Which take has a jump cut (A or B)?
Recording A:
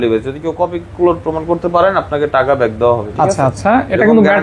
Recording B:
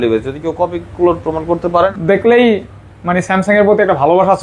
B